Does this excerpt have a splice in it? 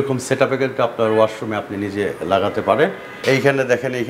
yes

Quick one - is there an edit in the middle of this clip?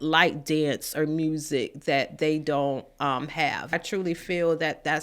yes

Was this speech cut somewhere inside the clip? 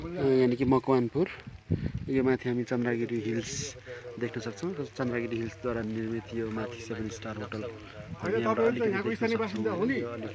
no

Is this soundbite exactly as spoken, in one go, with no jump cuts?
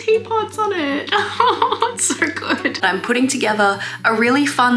no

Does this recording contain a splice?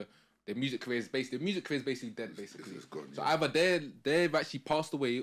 no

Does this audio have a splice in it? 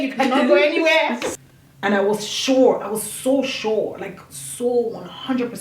yes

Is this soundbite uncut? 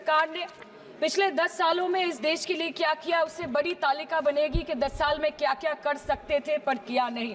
yes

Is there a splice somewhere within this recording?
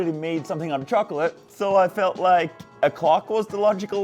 yes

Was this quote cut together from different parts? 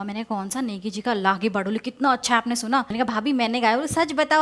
yes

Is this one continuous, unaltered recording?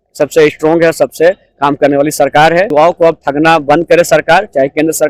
no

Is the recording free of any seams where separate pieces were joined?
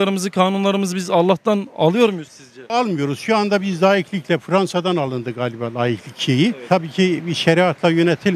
yes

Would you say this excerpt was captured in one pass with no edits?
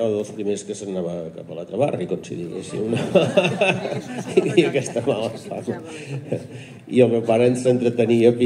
yes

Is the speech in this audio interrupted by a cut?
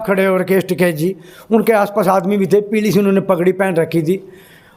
no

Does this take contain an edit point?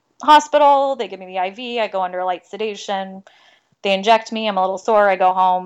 no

